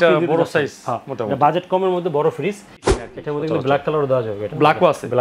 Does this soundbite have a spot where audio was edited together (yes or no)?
yes